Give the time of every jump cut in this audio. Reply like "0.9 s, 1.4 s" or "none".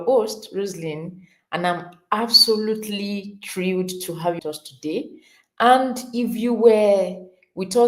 4.4 s